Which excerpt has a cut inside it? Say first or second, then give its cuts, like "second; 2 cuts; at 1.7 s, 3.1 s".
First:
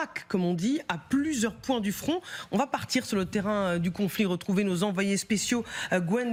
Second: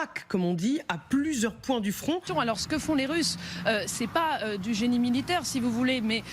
second; 1 cut; at 2.3 s